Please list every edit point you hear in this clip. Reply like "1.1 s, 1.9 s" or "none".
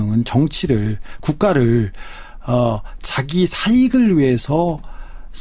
none